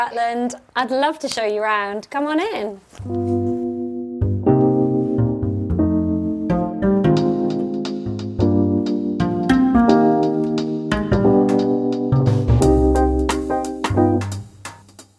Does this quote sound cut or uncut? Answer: uncut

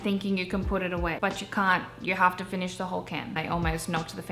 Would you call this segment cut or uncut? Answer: cut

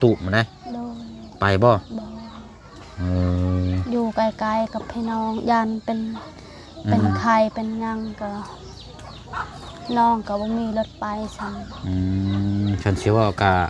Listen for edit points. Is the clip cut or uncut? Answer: uncut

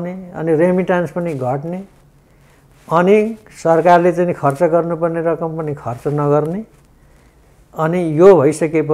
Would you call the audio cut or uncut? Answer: uncut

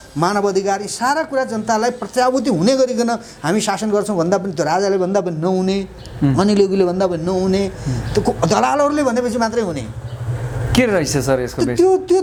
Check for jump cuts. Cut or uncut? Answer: uncut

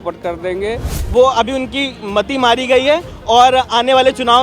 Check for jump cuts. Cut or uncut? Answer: cut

